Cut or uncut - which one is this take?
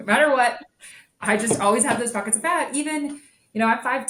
uncut